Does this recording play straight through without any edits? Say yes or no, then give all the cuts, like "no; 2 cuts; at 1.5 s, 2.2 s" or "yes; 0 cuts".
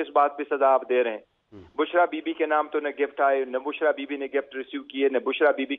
yes; 0 cuts